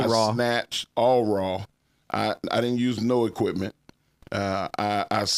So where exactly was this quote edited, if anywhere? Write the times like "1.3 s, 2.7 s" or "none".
none